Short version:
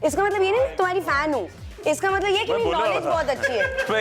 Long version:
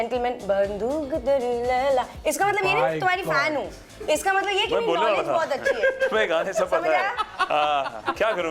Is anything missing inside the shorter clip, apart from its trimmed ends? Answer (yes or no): no